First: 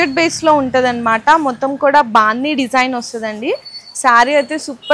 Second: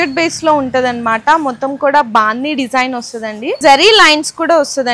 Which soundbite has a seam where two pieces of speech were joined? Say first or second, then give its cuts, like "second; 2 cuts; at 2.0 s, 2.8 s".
second; 1 cut; at 3.6 s